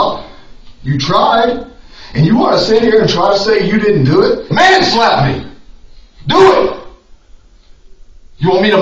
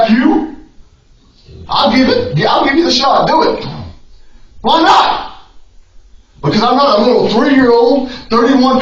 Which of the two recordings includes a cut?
first; 1 cut; at 4.5 s

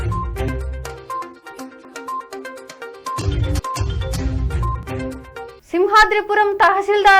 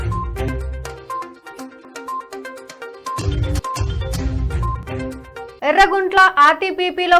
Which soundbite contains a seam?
second; 1 cut; at 5.5 s

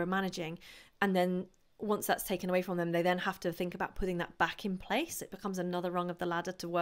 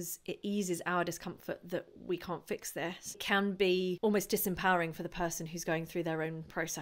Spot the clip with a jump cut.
second; 2 cuts; at 3.2 s, 4.0 s

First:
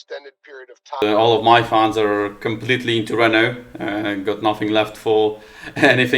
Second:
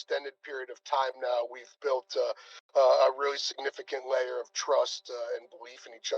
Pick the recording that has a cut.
first; 1 cut; at 1.0 s

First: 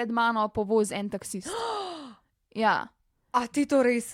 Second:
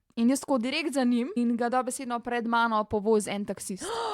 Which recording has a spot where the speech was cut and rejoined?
second; 1 cut; at 1.4 s

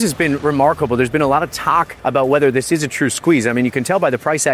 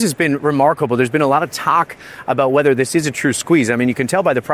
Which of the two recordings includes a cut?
first; 1 cut; at 1.9 s

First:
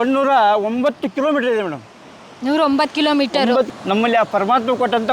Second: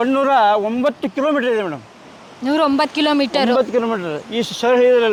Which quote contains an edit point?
first; 1 cut; at 3.7 s

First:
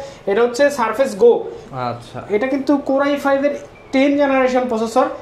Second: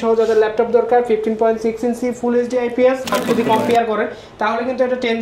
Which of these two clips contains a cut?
second; 1 cut; at 3.2 s

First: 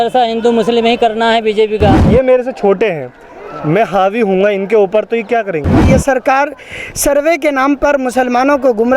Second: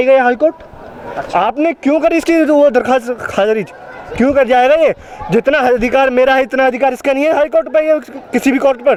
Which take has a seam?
first; 2 cuts; at 2.0 s, 5.8 s

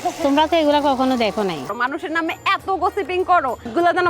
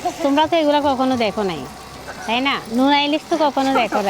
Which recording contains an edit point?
first; 1 cut; at 1.7 s

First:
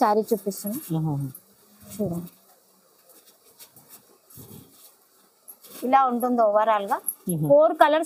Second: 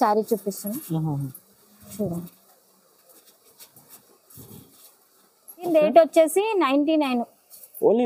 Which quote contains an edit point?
second; 1 cut; at 5.7 s

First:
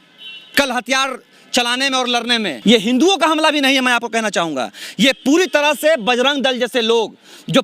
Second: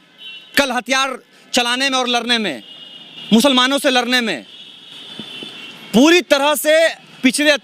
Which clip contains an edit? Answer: first; 1 cut; at 2.6 s

